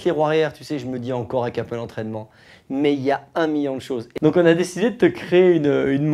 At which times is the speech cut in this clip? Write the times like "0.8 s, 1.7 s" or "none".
4.0 s